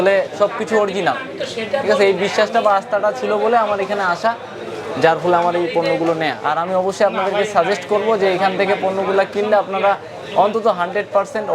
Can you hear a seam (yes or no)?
yes